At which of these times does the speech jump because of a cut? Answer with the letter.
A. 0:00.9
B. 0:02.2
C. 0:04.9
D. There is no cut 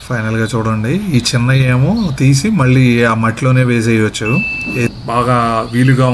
C